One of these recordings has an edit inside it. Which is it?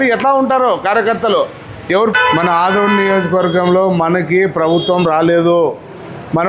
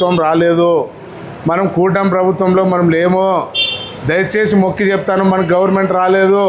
first; 1 cut; at 2.1 s

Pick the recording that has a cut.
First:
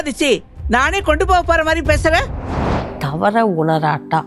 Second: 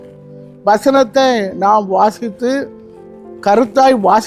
first; 1 cut; at 2.6 s

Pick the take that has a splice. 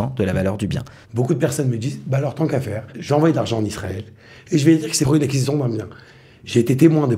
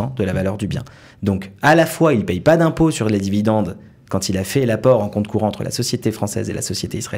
first; 3 cuts; at 1.0 s, 2.9 s, 5.1 s

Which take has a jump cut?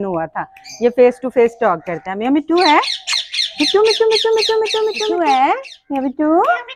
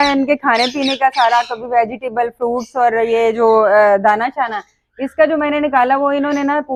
first; 1 cut; at 5.1 s

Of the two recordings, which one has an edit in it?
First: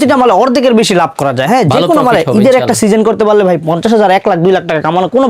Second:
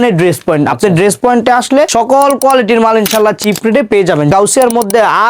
second; 2 cuts; at 1.9 s, 4.3 s

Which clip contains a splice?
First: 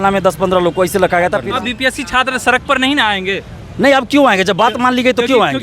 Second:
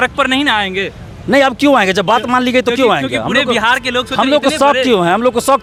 first; 1 cut; at 1.4 s

